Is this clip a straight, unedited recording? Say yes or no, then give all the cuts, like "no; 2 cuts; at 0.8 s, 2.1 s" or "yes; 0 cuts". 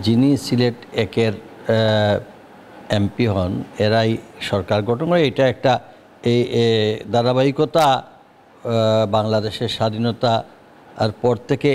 yes; 0 cuts